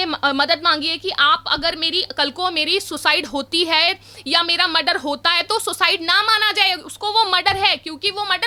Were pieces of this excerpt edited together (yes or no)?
no